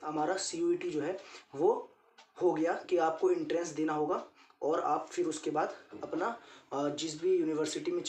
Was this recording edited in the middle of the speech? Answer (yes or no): no